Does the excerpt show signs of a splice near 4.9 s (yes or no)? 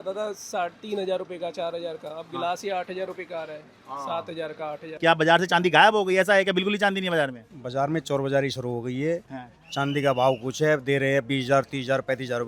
yes